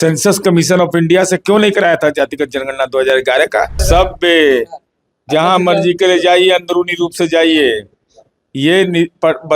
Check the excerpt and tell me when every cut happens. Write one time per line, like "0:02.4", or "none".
0:03.8